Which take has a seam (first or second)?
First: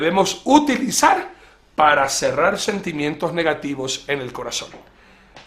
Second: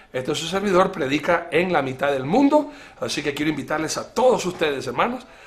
first